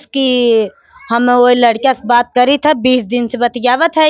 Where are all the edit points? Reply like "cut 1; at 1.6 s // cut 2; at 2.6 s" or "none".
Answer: none